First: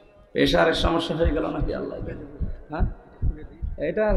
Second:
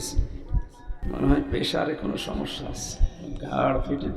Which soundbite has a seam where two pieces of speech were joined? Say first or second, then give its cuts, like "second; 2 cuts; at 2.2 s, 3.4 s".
second; 1 cut; at 1.0 s